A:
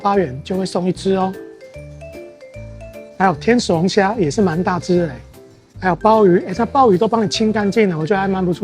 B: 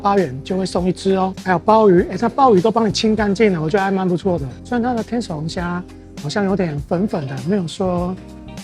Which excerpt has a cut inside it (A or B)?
B